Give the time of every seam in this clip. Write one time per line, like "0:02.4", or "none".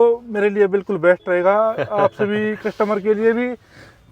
none